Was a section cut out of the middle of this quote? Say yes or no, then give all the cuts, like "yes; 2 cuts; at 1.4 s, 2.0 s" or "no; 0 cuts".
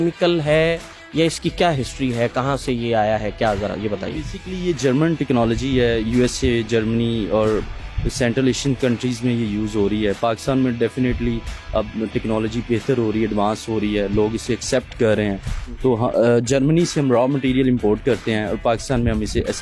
no; 0 cuts